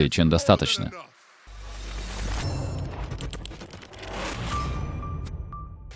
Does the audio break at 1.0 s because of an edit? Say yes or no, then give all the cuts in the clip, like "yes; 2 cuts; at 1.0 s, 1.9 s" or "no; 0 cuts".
yes; 1 cut; at 1.0 s